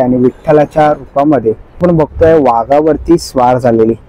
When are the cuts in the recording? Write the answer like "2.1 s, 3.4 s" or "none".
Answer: 1.8 s